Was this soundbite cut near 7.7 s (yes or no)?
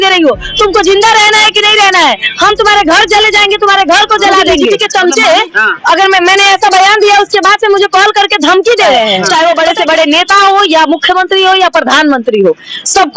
no